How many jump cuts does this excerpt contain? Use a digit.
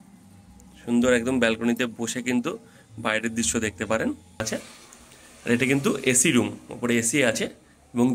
1